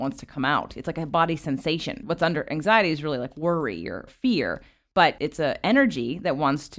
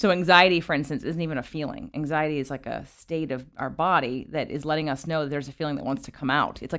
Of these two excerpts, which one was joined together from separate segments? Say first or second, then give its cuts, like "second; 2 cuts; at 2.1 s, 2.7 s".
first; 2 cuts; at 2.1 s, 4.1 s